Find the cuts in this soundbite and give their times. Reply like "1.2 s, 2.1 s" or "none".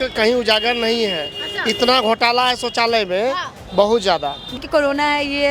4.5 s